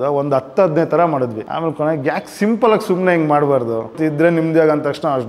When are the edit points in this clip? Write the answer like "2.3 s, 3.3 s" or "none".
1.4 s, 4.0 s